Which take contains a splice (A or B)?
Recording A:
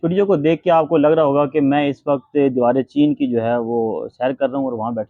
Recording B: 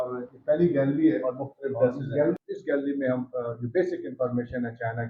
B